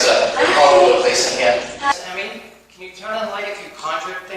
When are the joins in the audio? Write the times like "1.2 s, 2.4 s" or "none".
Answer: 1.9 s